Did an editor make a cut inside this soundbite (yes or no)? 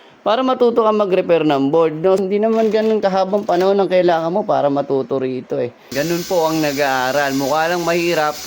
yes